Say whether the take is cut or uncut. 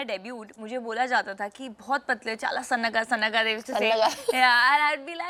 uncut